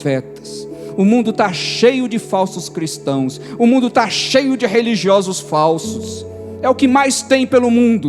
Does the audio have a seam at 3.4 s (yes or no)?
no